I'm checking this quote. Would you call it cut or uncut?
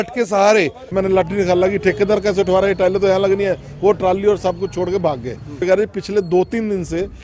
cut